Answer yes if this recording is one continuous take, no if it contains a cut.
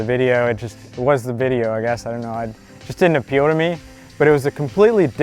yes